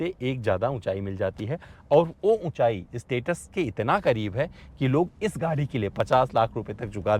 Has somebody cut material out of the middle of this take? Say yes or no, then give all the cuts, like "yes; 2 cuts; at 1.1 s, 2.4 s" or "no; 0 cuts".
no; 0 cuts